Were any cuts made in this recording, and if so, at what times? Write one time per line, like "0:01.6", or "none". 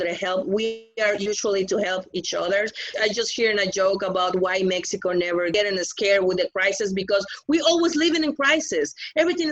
0:02.9
0:05.5